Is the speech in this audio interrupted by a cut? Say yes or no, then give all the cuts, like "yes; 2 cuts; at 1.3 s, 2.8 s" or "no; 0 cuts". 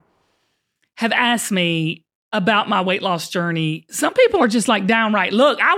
yes; 1 cut; at 3.8 s